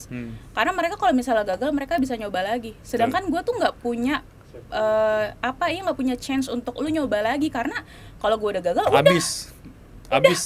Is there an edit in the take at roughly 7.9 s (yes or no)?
no